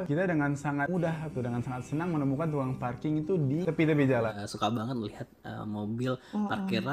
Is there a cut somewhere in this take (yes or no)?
yes